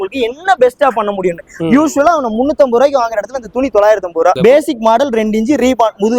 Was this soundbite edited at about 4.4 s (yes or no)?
yes